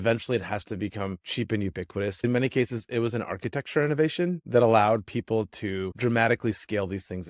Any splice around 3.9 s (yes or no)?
no